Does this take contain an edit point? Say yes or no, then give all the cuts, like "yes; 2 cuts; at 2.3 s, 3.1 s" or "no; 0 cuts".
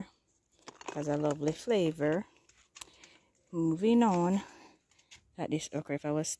no; 0 cuts